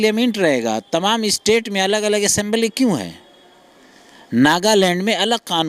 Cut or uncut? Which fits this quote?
uncut